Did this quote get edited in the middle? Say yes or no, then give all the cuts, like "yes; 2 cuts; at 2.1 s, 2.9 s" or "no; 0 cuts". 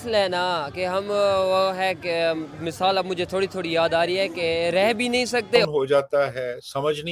yes; 1 cut; at 5.6 s